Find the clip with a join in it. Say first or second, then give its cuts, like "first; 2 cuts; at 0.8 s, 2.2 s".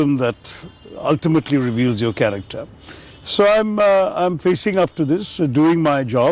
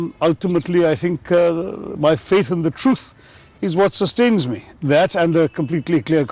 second; 1 cut; at 2.9 s